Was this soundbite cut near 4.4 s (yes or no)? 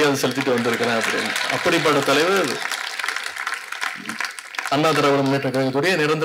no